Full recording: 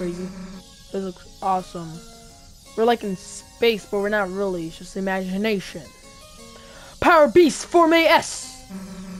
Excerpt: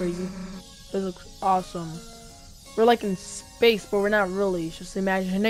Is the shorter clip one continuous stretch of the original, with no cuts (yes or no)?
yes